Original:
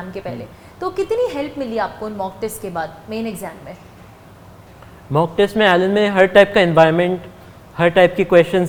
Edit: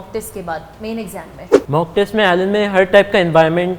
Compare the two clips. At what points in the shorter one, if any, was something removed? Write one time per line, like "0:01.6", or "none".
0:01.5